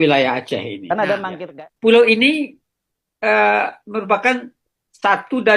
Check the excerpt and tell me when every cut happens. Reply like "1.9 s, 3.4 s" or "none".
1.3 s